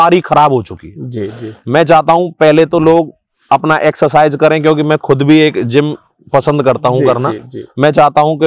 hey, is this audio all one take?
yes; 0 cuts

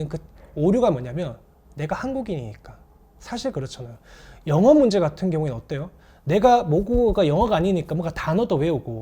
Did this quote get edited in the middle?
no; 0 cuts

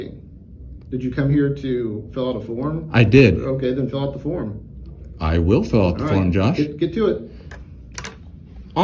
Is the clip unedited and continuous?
yes; 0 cuts

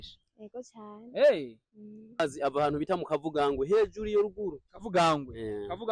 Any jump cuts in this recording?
yes; 1 cut; at 2.2 s

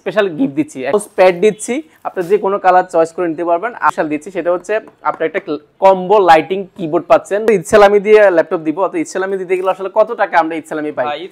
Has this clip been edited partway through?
yes; 3 cuts; at 0.9 s, 3.9 s, 7.5 s

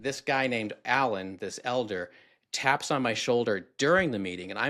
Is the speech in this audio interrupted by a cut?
no; 0 cuts

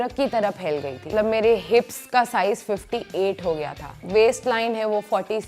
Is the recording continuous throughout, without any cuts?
no; 2 cuts; at 1.1 s, 4.0 s

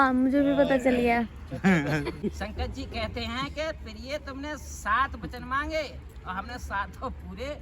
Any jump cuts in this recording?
yes; 1 cut; at 2.2 s

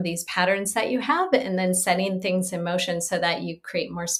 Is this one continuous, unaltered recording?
yes; 0 cuts

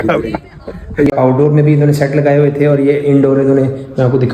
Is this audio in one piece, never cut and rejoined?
no; 1 cut; at 1.1 s

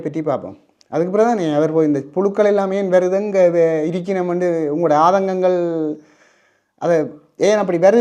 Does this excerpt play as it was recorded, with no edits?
yes; 0 cuts

